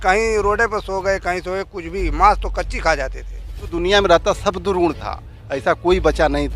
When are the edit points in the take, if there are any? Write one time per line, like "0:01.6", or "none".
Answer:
0:03.6